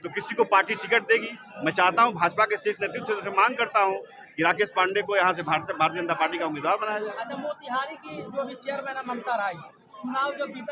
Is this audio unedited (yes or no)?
yes